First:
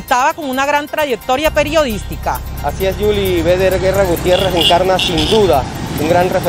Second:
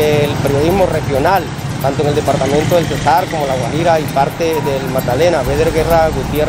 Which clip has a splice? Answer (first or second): first